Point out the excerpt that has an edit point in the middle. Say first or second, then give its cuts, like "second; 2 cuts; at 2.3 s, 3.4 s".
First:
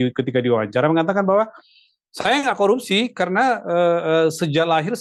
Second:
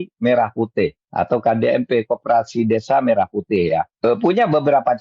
second; 2 cuts; at 1.0 s, 3.9 s